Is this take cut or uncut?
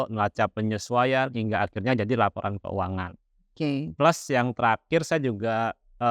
uncut